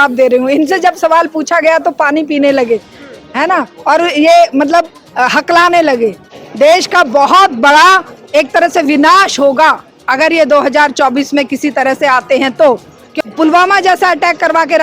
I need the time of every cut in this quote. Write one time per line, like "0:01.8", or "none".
0:06.3
0:13.1